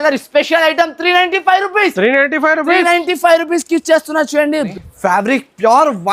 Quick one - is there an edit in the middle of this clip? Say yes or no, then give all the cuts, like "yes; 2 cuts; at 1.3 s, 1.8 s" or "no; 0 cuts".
yes; 1 cut; at 4.7 s